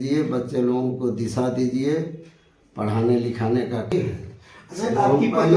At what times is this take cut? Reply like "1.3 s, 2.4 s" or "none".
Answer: 3.9 s